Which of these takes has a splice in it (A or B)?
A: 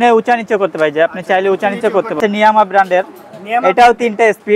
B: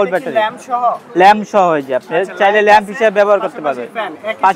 A